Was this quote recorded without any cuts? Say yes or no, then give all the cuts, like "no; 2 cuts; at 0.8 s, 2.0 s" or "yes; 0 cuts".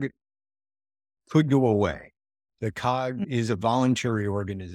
yes; 0 cuts